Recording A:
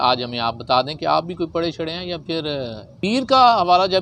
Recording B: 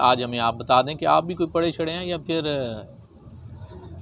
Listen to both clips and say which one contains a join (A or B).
A